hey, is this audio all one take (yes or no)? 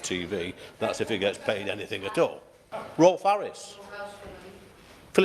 no